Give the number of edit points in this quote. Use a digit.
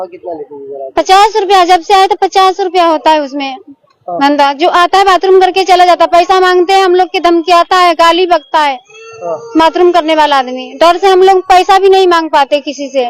0